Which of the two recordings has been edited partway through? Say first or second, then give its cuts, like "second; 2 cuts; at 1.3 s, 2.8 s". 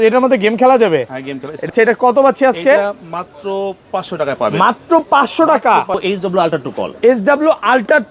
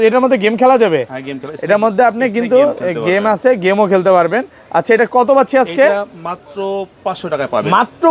first; 2 cuts; at 1.7 s, 5.9 s